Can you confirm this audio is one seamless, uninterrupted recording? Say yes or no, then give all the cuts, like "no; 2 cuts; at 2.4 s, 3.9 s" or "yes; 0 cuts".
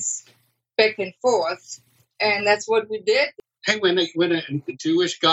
no; 1 cut; at 3.4 s